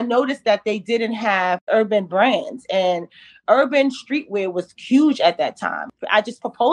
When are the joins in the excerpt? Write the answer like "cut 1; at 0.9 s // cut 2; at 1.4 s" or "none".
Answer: cut 1; at 5.7 s